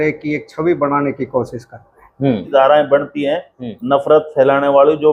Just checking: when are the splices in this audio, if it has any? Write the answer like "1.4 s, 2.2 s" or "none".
2.4 s